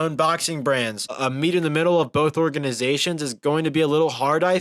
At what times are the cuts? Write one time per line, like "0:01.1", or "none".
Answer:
0:01.0